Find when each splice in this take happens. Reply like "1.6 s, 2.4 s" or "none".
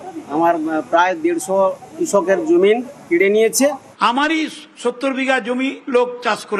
3.9 s